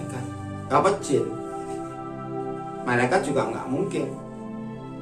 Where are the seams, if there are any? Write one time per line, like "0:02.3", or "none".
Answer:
none